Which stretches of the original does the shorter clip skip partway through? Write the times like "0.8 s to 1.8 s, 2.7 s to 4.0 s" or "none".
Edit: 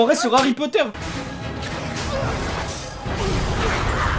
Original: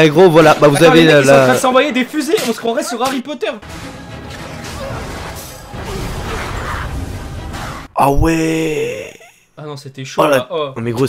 none